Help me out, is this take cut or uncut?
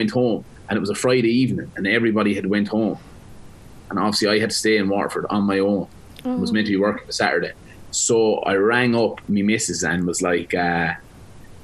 uncut